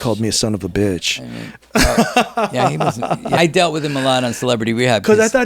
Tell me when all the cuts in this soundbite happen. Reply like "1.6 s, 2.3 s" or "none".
3.4 s